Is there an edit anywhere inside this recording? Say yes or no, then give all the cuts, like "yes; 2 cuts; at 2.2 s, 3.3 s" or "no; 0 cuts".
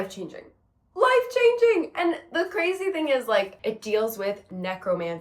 yes; 1 cut; at 3.5 s